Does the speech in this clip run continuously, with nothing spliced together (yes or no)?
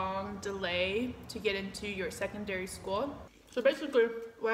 no